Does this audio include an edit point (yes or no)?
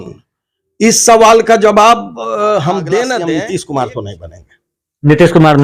yes